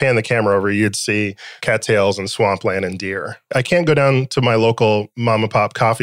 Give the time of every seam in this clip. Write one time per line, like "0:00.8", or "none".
0:01.5
0:03.4